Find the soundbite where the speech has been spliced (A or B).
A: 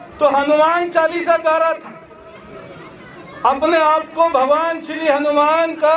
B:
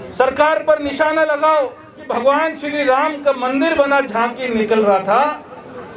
B